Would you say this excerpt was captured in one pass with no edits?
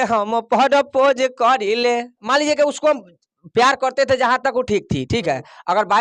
no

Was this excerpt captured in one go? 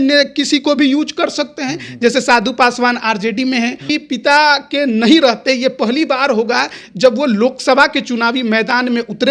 no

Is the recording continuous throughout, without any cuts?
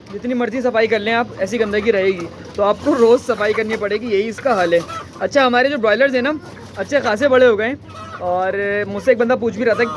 yes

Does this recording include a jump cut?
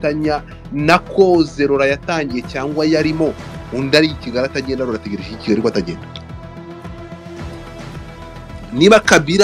yes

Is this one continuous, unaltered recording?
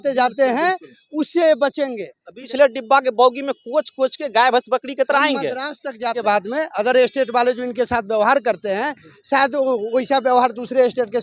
no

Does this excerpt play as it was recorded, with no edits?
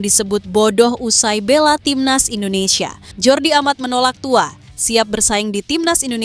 no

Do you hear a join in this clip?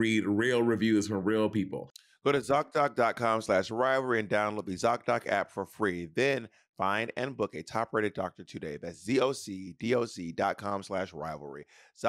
no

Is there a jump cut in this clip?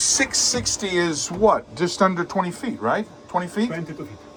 no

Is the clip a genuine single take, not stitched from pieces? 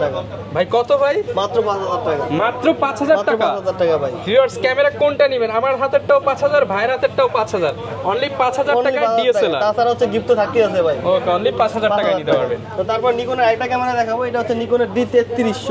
yes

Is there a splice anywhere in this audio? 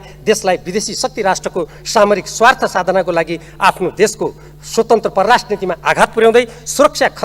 no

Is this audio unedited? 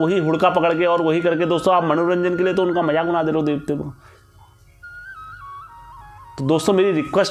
yes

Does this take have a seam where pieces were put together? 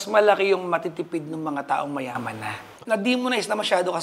yes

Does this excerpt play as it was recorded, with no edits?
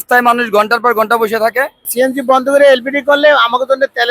no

